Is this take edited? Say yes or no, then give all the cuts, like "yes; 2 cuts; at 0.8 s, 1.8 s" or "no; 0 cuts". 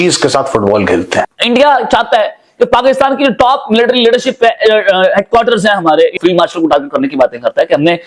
yes; 2 cuts; at 1.4 s, 6.1 s